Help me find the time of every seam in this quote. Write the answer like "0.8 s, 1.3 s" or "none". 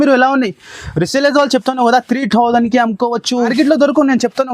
3.5 s